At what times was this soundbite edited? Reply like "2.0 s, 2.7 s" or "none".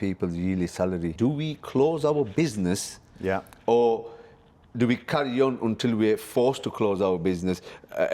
1.1 s